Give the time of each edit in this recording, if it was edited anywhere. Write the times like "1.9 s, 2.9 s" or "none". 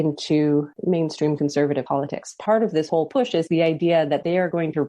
2.3 s